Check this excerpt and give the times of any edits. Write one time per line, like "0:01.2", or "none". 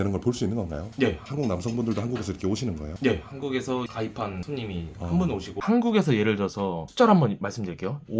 0:00.9
0:05.6